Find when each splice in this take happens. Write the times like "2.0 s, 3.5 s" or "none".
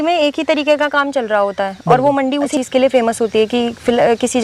2.5 s